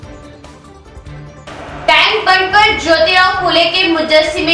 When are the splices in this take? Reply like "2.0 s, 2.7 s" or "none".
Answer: 1.0 s